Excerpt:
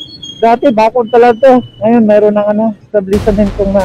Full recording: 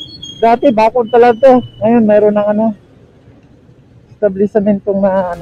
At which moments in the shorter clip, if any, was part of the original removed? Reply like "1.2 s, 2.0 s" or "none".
2.8 s

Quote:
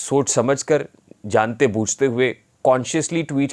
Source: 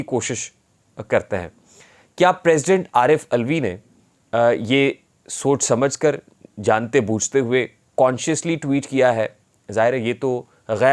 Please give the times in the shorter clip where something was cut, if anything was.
none

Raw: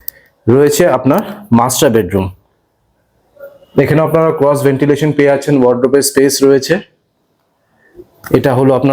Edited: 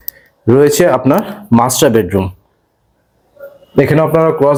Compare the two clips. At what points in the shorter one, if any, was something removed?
none

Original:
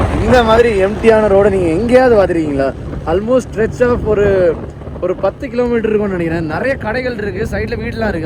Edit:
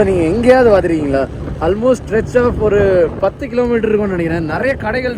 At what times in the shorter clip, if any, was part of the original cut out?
3.2 s

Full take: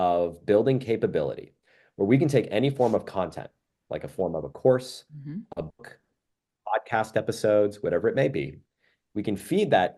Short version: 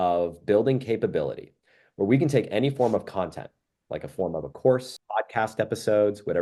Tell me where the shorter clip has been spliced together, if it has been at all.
5.0 s

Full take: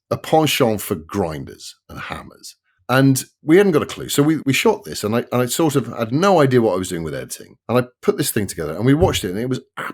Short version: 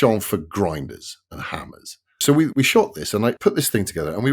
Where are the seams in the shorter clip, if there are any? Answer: 2.1 s, 3.4 s

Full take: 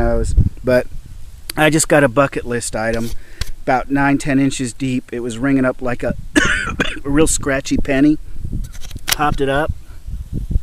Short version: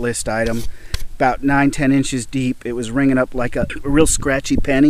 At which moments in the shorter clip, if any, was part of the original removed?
3.8 s

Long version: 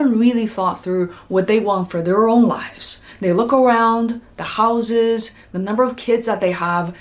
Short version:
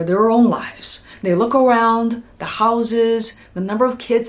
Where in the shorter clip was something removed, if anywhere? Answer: none

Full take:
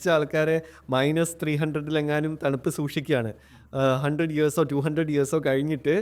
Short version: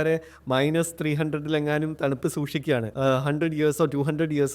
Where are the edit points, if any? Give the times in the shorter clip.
2.9 s

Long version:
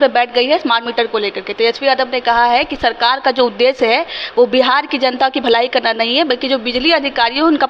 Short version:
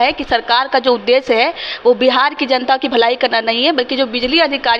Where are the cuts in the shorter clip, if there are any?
none

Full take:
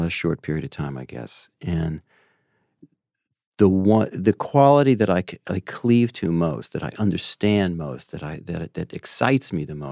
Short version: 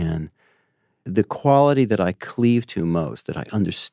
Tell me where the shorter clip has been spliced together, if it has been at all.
1.0 s, 2.2 s

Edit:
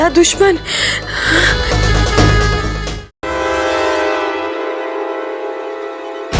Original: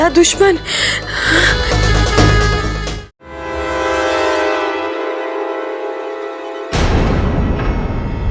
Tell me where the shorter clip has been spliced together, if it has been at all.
3.2 s

